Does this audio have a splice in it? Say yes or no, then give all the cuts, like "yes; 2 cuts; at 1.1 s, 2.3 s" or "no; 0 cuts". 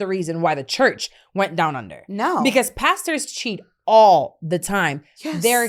no; 0 cuts